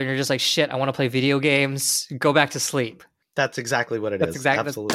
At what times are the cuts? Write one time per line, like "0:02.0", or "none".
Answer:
none